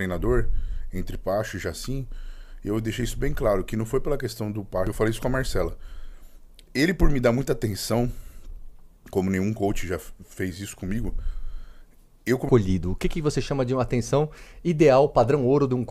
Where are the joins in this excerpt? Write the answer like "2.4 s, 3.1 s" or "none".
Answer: 4.9 s, 12.5 s